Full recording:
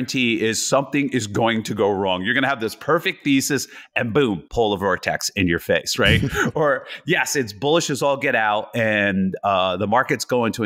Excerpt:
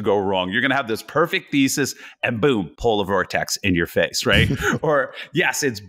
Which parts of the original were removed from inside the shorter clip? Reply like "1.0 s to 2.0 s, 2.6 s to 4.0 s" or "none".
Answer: none